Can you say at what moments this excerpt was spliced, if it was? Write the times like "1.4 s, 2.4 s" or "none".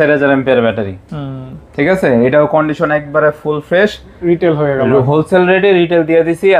4.1 s